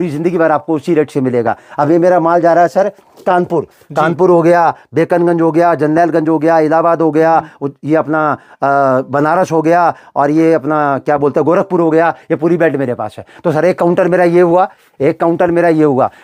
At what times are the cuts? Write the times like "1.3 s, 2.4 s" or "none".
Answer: none